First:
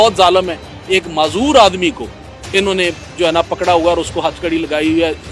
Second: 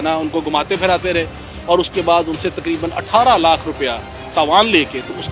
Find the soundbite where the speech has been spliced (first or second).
second